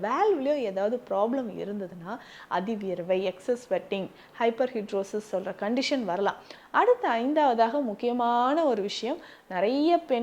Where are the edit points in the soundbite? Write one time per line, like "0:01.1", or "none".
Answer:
0:06.5